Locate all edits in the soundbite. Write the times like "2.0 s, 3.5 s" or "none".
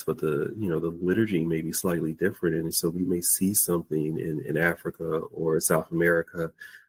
none